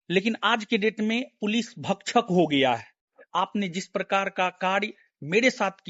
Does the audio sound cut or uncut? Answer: cut